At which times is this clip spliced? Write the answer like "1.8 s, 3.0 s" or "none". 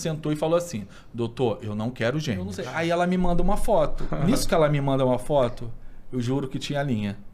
2.6 s